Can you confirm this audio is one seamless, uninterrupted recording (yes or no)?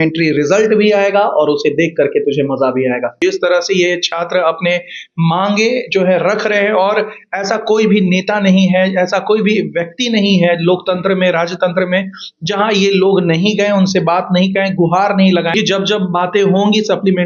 no